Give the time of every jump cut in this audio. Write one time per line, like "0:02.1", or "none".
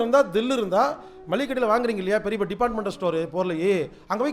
none

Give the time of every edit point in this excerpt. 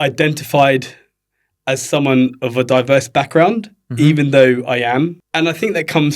none

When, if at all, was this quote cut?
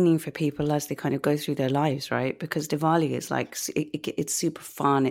none

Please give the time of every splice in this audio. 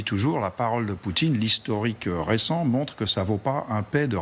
none

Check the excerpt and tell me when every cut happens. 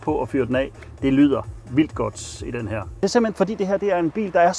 0:03.0

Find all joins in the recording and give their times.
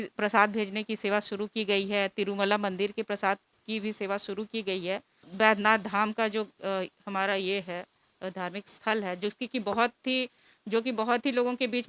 none

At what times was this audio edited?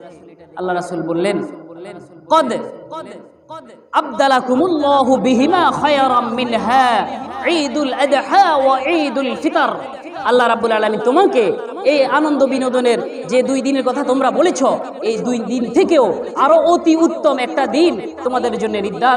none

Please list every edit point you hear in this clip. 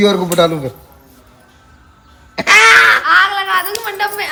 none

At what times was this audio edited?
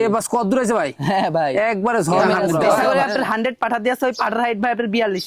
0:02.9

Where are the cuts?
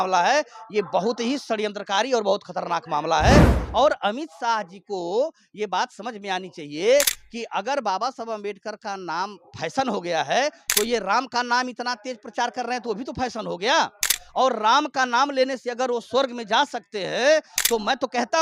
0:03.6

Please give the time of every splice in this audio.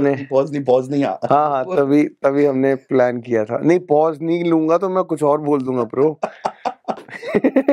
none

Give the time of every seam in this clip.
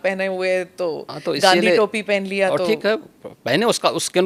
none

